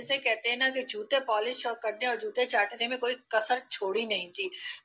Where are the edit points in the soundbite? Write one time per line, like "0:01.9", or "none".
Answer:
none

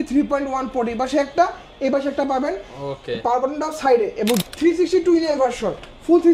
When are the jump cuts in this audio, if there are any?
0:04.4

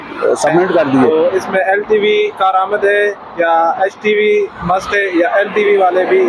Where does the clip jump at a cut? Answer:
0:01.1

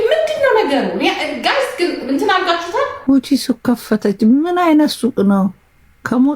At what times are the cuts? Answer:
0:03.0

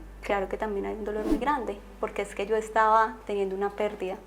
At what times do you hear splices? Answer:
none

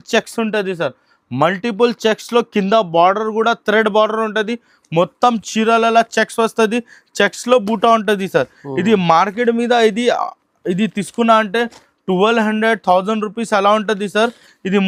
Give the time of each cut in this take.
none

